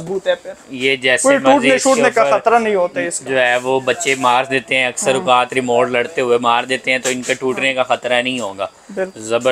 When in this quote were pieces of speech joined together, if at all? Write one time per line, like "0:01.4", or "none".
none